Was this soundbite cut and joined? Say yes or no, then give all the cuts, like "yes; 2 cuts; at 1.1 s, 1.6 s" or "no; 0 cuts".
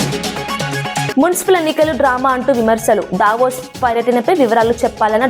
yes; 1 cut; at 1.1 s